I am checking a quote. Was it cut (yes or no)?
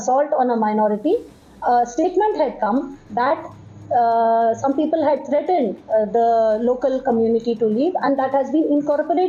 no